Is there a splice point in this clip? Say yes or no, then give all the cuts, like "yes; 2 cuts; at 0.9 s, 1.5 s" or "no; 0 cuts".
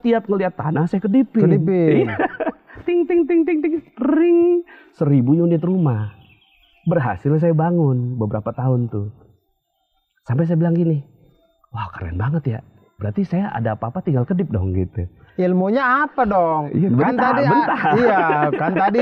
no; 0 cuts